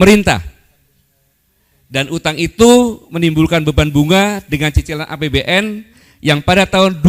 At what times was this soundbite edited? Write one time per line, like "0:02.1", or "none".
none